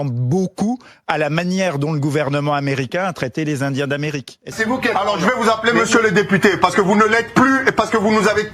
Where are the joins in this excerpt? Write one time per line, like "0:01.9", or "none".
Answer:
0:04.5